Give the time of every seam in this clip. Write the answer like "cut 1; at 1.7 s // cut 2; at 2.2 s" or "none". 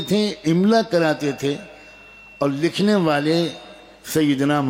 none